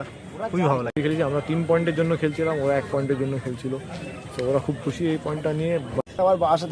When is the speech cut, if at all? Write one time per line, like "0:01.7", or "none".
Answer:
0:01.0
0:06.0